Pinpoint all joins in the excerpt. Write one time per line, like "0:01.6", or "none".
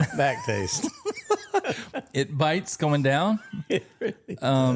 none

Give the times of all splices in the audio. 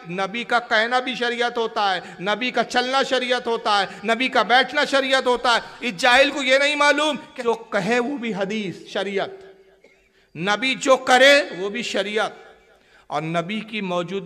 0:07.3

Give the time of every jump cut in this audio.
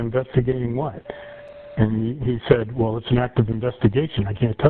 none

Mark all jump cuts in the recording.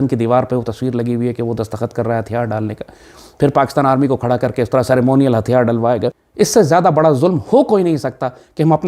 0:06.2

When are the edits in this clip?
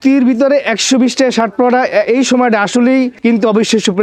0:03.1

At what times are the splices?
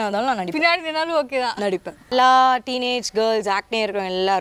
0:02.1

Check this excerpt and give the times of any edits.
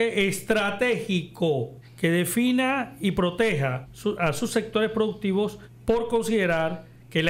0:01.8
0:03.9
0:05.7

